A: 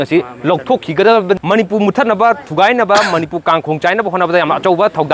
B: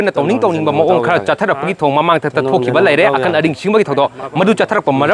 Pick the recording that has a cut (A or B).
A